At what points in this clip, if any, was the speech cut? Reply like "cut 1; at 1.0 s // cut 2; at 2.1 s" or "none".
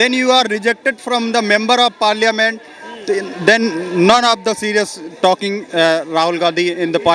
none